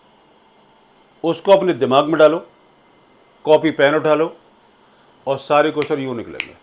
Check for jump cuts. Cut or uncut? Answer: uncut